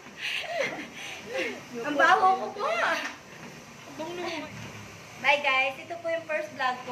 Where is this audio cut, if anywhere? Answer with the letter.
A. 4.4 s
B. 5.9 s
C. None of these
A